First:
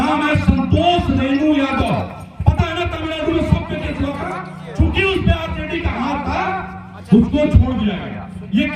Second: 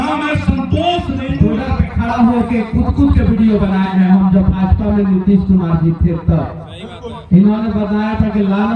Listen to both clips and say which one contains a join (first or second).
second